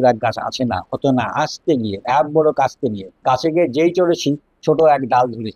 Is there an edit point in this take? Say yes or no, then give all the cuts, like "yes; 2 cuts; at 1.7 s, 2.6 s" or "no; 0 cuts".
yes; 1 cut; at 3.1 s